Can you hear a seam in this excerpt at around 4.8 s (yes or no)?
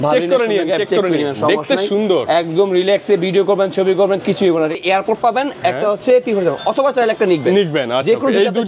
yes